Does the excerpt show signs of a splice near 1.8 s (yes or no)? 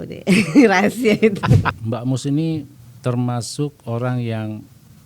yes